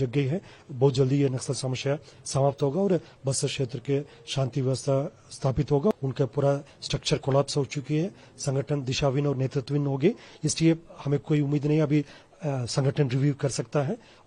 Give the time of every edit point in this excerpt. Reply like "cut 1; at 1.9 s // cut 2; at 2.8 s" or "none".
cut 1; at 5.9 s